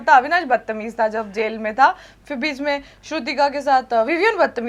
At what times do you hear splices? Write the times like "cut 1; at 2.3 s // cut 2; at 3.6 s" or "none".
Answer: none